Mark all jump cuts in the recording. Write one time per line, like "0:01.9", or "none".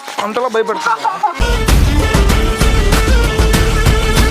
0:01.4